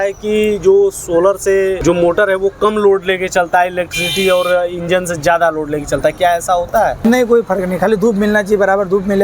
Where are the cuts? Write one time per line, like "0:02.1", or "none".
0:01.8
0:07.0